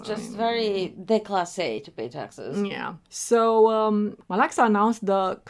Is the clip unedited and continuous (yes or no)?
yes